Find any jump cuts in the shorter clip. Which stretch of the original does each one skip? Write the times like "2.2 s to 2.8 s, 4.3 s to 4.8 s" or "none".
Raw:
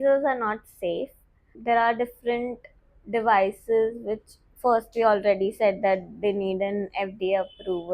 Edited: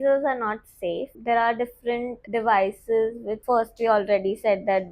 1.1 s to 1.5 s, 2.6 s to 3.0 s, 4.1 s to 4.4 s